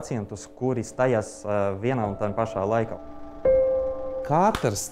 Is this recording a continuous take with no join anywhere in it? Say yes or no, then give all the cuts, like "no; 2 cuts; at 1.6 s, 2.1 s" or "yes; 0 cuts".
no; 2 cuts; at 3.0 s, 3.8 s